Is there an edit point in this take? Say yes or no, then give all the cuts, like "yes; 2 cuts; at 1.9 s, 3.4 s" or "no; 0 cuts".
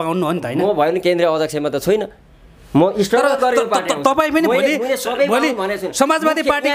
no; 0 cuts